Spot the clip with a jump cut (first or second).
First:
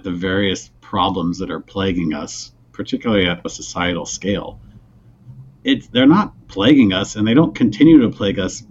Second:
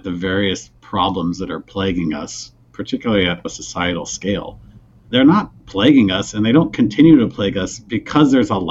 second